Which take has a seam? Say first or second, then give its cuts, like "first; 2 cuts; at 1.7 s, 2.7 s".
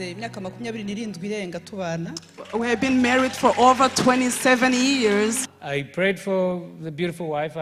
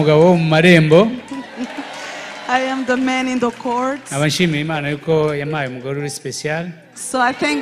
first; 1 cut; at 5.4 s